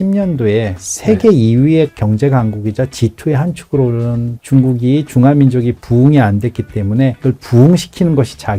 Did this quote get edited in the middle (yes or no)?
no